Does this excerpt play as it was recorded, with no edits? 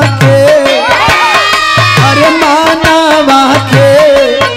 yes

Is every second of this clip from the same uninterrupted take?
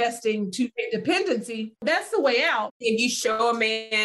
no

